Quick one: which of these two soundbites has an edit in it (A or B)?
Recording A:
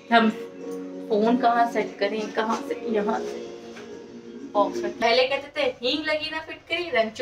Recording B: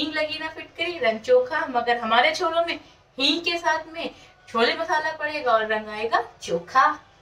A